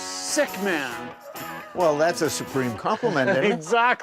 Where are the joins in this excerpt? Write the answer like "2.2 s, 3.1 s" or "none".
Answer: none